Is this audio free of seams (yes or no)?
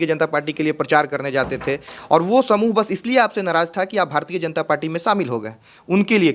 yes